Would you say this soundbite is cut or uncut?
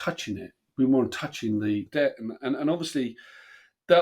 cut